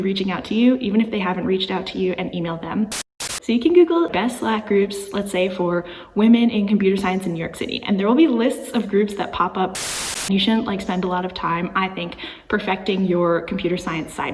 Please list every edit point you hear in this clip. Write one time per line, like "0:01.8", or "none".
0:02.9
0:09.8